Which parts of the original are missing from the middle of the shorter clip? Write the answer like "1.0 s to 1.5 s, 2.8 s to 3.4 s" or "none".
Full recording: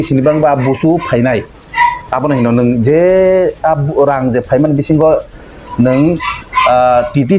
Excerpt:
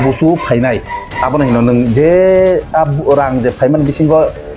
1.7 s to 2.0 s